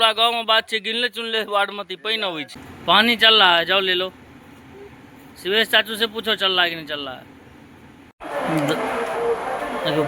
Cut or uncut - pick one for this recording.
cut